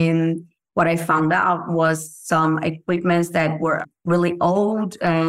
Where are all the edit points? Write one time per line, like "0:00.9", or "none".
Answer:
0:03.8